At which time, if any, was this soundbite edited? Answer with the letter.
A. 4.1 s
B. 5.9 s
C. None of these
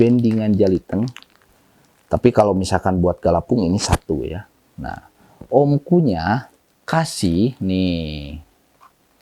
C